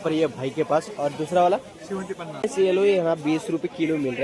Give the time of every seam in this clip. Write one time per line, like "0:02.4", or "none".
0:02.5